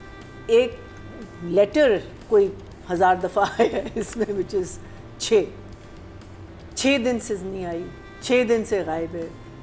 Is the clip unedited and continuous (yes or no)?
yes